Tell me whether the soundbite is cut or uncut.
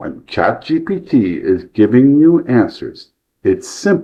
uncut